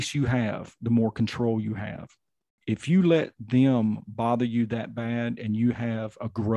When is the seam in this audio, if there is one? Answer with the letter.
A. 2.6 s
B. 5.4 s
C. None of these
A